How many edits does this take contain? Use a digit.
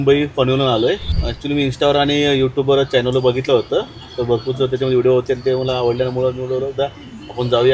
1